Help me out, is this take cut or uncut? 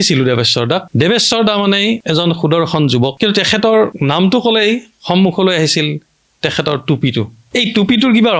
cut